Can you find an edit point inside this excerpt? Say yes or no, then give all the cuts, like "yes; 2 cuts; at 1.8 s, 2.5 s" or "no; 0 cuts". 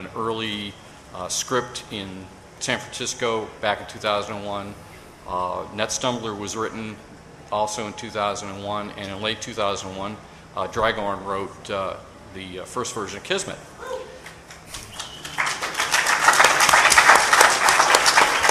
no; 0 cuts